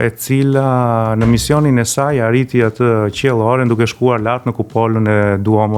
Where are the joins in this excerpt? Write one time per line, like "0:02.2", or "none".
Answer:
none